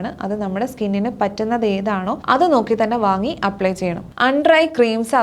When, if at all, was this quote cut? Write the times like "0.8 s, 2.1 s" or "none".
2.2 s, 4.0 s